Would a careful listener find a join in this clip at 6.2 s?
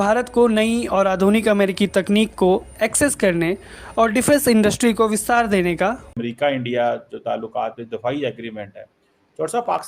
yes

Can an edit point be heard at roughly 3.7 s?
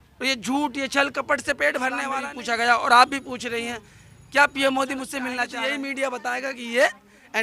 no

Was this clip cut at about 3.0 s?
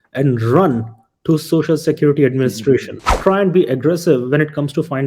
yes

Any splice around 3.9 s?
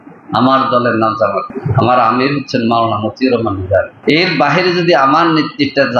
yes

